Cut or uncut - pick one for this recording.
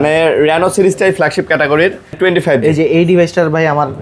cut